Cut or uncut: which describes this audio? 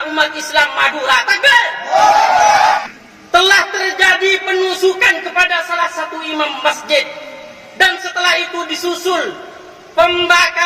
cut